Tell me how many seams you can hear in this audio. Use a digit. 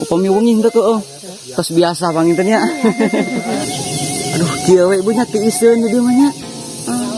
1